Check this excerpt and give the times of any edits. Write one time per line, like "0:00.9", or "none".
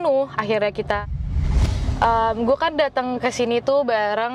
0:01.5

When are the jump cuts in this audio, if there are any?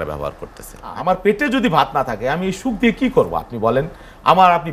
0:00.9

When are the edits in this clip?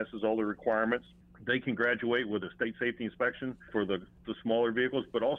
0:03.7

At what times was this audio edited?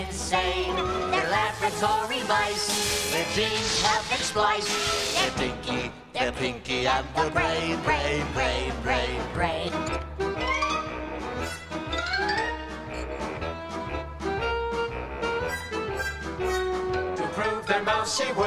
0:11.2

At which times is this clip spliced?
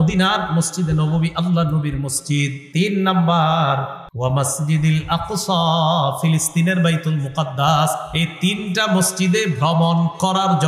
0:02.6
0:04.0

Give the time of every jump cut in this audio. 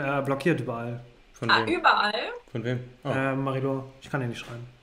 none

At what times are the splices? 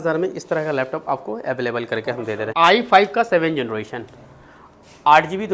0:02.5

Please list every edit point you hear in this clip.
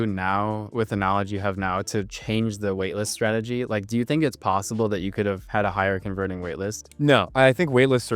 none

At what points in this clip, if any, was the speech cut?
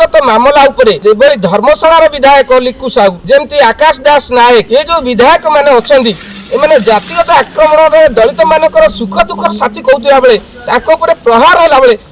0:01.0
0:03.2

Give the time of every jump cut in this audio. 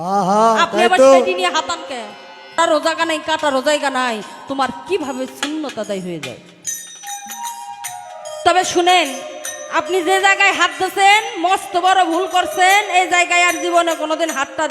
0:02.6

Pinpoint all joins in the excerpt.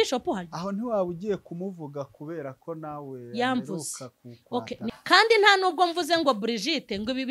0:04.9

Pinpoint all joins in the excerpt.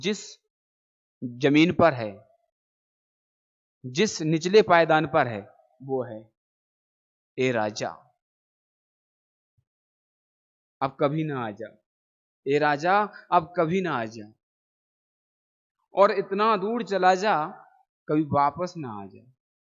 none

